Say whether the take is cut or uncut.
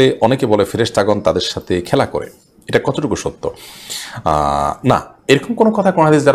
uncut